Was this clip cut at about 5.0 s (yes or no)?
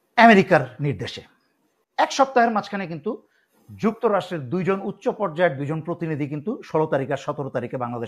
no